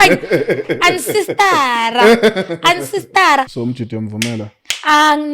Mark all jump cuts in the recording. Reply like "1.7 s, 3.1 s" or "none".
3.5 s